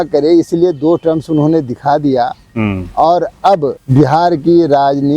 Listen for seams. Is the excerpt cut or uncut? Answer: cut